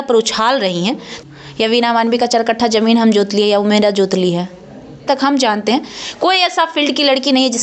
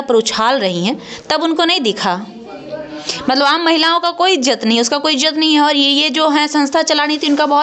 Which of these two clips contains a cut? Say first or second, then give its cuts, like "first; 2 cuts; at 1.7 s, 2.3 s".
first; 2 cuts; at 1.1 s, 5.0 s